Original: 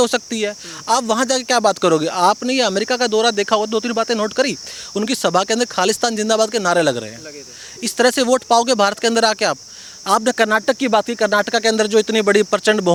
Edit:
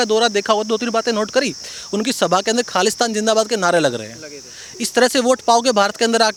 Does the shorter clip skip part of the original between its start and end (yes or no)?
no